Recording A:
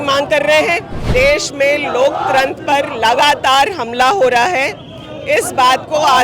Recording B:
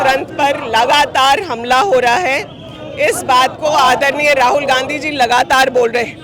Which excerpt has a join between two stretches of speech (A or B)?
A